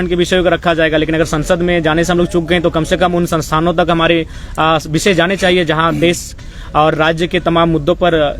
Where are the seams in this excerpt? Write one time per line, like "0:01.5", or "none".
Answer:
none